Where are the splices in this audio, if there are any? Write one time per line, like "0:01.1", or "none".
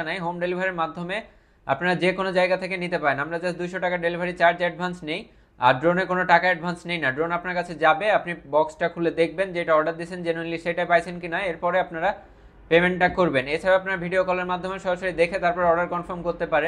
none